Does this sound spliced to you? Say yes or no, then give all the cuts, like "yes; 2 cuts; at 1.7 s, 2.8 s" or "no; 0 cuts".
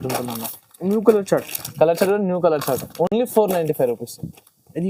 no; 0 cuts